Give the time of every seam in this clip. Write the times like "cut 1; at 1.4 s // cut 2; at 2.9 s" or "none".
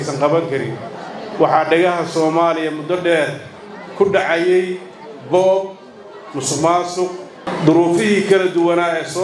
cut 1; at 7.4 s

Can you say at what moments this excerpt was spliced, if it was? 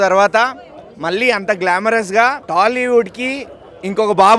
cut 1; at 2.4 s

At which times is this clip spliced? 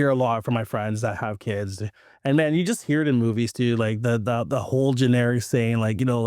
none

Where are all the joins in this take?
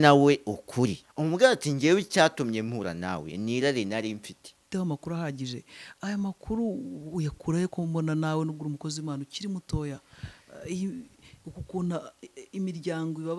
cut 1; at 1.1 s // cut 2; at 4.6 s

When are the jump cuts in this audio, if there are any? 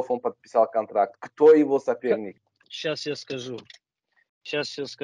cut 1; at 2.4 s

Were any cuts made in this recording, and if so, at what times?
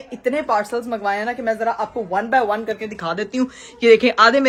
none

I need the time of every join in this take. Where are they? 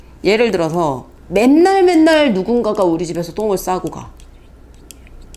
cut 1; at 1.1 s

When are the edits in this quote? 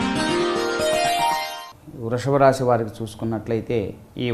cut 1; at 1.6 s

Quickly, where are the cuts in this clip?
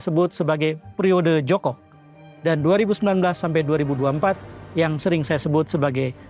none

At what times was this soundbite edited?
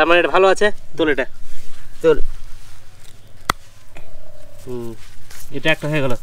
none

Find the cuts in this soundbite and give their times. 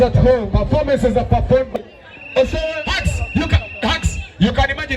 cut 1; at 1.7 s

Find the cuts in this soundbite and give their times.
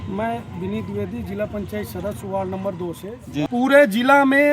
cut 1; at 3.5 s

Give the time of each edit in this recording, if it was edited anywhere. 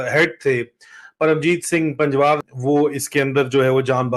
cut 1; at 2.5 s

